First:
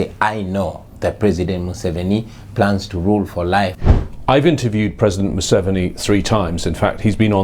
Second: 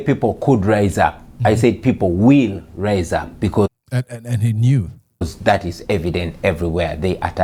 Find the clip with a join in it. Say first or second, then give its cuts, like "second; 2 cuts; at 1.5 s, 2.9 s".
first; 1 cut; at 3.8 s